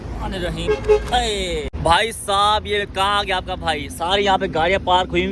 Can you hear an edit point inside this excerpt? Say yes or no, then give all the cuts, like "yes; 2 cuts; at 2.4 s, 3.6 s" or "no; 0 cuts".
no; 0 cuts